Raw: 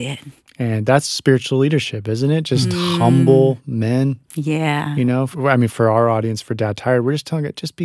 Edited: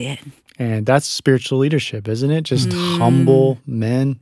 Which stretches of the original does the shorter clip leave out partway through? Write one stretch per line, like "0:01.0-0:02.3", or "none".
none